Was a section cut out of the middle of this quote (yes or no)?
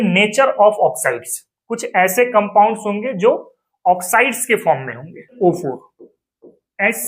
yes